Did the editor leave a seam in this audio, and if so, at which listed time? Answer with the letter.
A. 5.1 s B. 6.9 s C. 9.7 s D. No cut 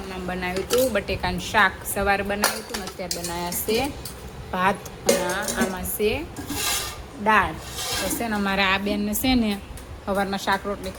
D